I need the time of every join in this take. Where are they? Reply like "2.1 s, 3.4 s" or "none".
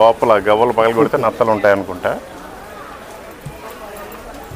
none